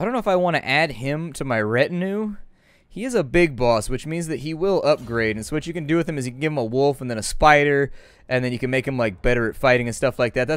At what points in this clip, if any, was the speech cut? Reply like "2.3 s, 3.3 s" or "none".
6.8 s